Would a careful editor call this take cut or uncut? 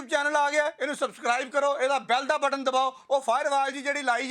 cut